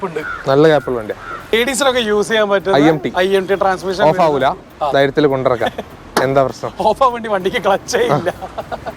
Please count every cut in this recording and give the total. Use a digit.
1